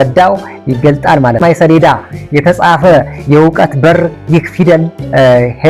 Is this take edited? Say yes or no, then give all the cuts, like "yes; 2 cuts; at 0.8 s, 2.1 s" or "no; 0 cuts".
yes; 1 cut; at 1.4 s